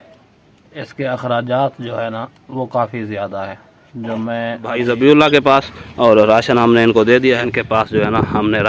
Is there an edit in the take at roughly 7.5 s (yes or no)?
yes